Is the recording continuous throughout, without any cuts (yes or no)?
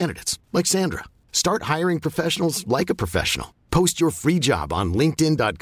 yes